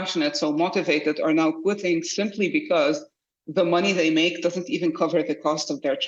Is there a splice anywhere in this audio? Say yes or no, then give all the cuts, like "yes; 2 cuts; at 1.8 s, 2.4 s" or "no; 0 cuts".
no; 0 cuts